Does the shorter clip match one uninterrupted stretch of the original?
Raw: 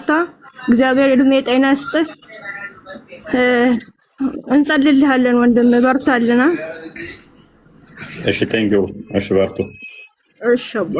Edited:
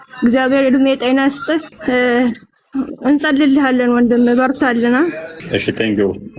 no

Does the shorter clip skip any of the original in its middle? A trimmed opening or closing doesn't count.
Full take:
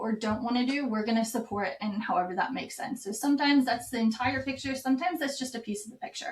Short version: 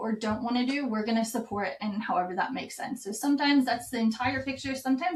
no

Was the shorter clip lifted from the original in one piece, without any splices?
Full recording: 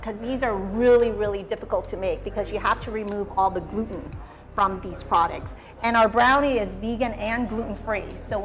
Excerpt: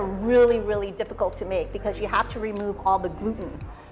yes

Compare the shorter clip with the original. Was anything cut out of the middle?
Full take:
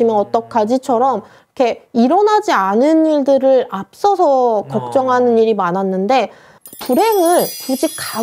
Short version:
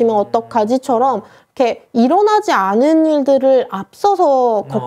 no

